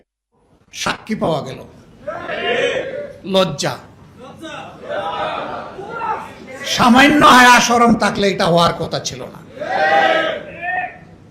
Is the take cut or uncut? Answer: uncut